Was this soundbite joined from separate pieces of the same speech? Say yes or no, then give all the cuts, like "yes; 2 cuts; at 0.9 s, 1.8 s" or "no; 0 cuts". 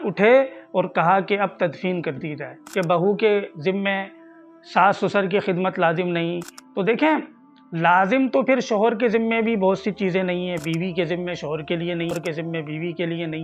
yes; 2 cuts; at 2.6 s, 12.1 s